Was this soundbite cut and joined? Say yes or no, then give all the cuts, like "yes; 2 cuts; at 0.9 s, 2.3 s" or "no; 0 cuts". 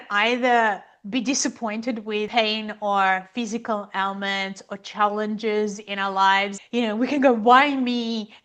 no; 0 cuts